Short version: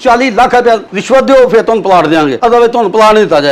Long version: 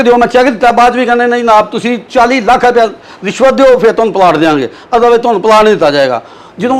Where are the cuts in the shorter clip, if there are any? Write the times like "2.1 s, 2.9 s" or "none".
0.9 s, 2.3 s